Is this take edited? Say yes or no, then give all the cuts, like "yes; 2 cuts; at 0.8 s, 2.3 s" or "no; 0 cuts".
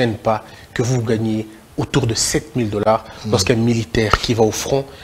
no; 0 cuts